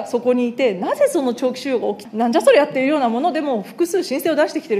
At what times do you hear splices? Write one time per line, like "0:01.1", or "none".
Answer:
0:02.0